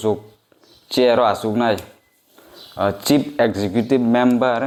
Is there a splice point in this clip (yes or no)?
no